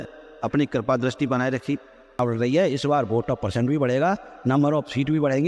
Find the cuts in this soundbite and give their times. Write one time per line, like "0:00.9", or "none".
0:02.2